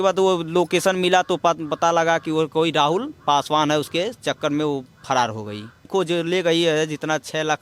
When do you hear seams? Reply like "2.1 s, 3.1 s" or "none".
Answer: 5.9 s